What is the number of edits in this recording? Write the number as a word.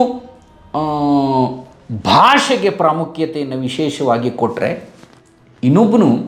zero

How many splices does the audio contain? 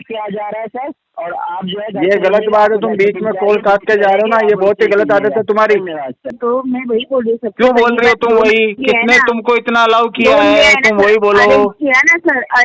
one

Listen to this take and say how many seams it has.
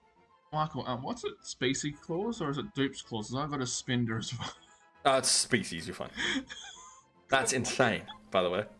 zero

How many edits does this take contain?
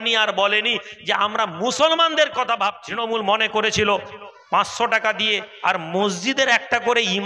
one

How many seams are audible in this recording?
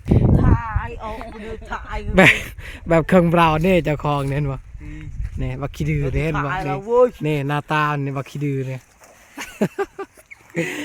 zero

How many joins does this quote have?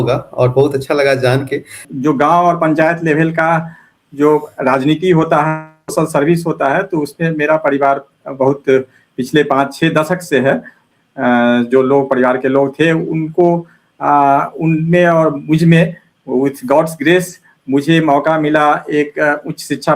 two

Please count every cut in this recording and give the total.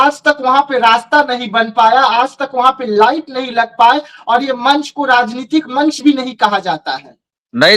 zero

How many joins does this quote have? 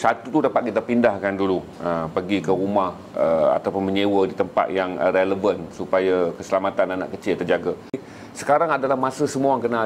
one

